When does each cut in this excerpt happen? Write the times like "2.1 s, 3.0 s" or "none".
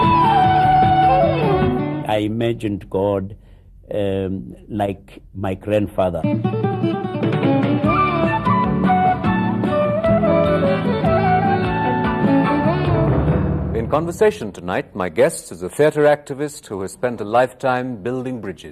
17.4 s